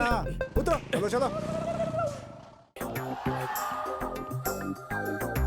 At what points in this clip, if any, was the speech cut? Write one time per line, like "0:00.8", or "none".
0:02.6